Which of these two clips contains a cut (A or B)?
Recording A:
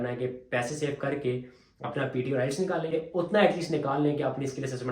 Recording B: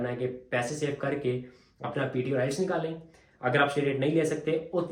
A